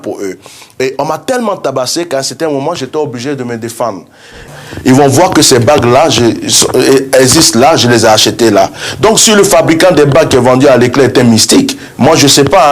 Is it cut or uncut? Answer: cut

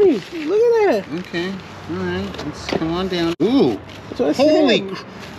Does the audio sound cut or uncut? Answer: cut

